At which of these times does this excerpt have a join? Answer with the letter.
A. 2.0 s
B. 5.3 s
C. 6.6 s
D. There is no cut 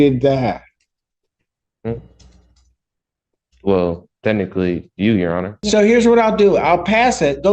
B